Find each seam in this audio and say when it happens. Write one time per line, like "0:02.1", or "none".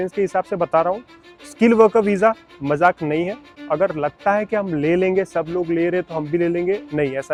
none